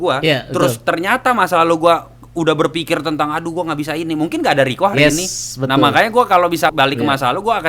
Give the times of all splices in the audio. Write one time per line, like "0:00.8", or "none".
0:06.7